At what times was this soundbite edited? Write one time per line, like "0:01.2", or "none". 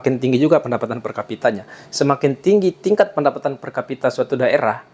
none